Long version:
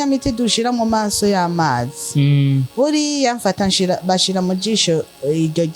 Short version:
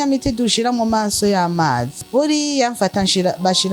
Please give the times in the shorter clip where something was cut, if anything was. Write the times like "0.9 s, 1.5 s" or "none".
2.0 s